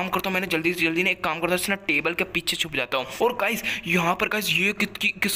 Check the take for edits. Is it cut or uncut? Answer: cut